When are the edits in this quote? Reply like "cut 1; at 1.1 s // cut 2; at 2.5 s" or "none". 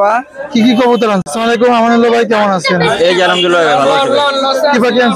cut 1; at 1.3 s